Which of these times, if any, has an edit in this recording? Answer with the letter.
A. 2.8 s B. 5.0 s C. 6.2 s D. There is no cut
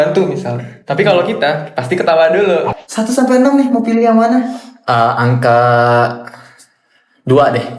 A